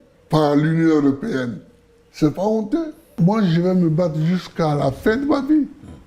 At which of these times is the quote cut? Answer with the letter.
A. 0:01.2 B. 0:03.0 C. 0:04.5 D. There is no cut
B